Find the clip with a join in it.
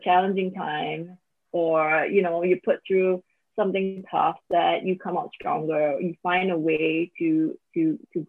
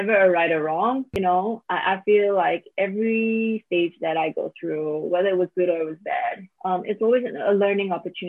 second; 2 cuts; at 1.4 s, 6.5 s

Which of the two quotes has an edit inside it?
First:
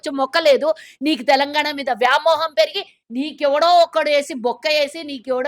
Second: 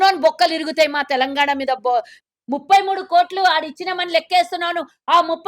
second; 1 cut; at 2.1 s

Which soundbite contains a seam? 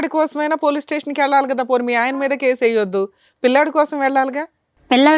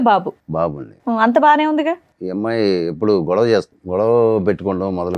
second; 2 cuts; at 2.1 s, 3.8 s

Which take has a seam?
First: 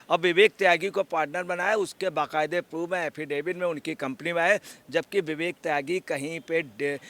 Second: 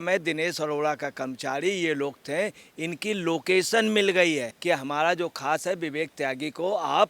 second; 1 cut; at 4.5 s

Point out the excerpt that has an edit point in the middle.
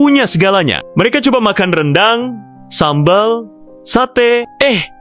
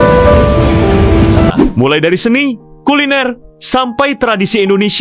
second; 1 cut; at 1.5 s

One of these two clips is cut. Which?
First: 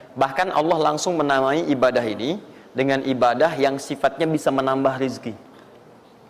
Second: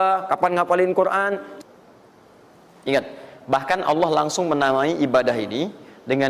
second; 1 cut; at 1.5 s

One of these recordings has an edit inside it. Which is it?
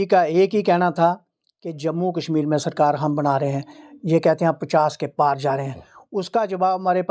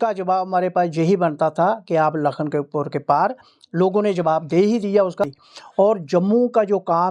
second; 1 cut; at 5.2 s

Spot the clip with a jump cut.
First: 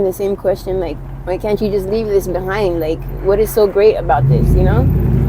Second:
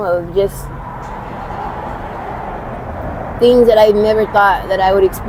first; 1 cut; at 1.0 s

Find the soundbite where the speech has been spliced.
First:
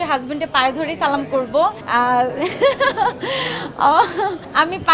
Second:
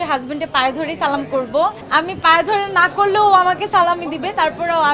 second; 1 cut; at 1.8 s

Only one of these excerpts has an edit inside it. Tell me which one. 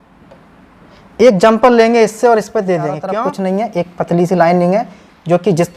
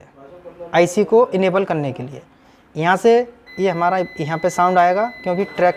first; 1 cut; at 3.1 s

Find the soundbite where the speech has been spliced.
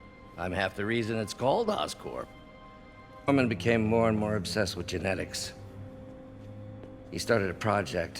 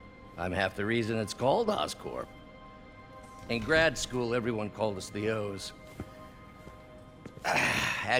first; 1 cut; at 3.3 s

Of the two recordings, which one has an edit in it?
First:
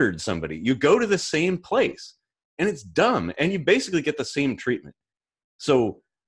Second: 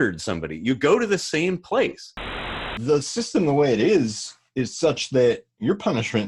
second; 1 cut; at 2.7 s

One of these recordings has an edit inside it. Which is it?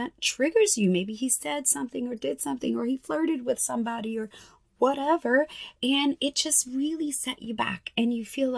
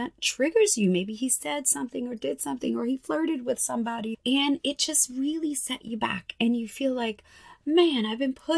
second; 1 cut; at 4.1 s

